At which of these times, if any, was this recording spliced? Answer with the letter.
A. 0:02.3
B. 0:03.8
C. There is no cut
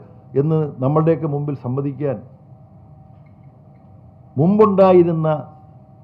C